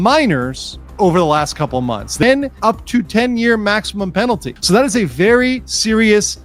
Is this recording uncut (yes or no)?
no